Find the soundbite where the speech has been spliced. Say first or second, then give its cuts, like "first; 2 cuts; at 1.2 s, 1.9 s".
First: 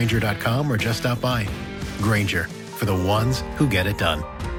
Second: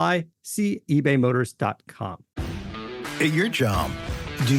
second; 1 cut; at 2.3 s